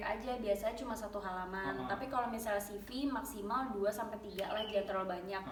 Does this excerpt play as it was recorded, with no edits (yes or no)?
yes